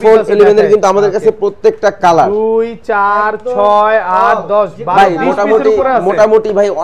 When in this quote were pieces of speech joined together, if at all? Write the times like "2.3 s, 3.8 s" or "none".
none